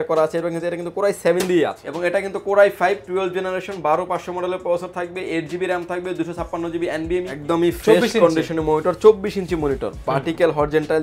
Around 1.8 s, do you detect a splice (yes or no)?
yes